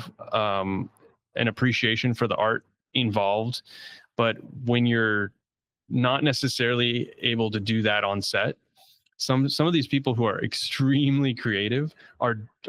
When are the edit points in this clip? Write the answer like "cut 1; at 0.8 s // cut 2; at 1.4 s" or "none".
none